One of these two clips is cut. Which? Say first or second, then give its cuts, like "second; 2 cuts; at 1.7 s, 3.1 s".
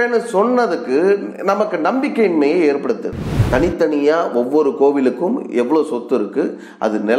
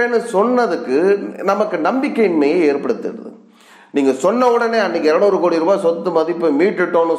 first; 1 cut; at 3.3 s